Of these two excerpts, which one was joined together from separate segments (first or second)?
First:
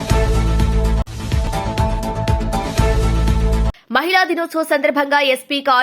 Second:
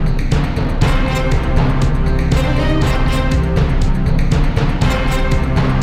first